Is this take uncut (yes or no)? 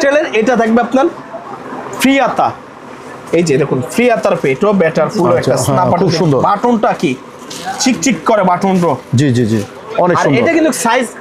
yes